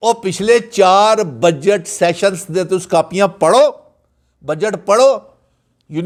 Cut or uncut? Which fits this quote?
uncut